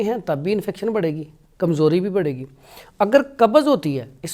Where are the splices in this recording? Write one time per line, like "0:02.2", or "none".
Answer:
none